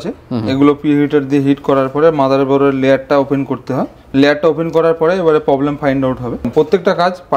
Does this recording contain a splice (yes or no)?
yes